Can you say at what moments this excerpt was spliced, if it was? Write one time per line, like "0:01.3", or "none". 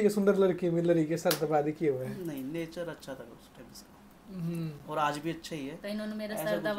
none